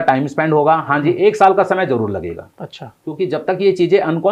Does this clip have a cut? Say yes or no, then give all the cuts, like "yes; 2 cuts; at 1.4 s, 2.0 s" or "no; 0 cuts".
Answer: no; 0 cuts